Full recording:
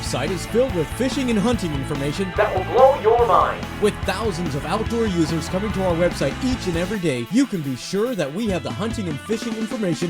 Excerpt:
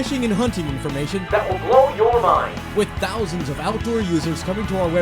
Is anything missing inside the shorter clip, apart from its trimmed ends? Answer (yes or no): no